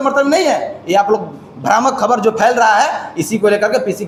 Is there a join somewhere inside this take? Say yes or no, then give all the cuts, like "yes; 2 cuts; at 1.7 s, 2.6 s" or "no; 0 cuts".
no; 0 cuts